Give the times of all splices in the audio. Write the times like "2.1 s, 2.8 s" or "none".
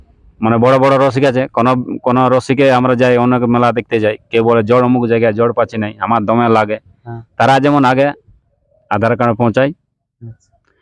none